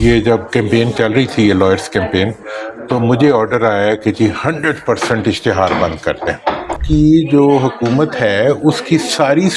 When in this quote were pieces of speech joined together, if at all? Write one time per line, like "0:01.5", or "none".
0:06.8